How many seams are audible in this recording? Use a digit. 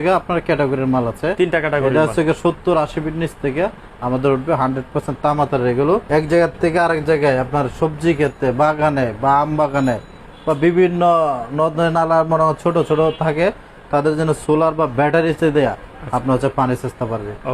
1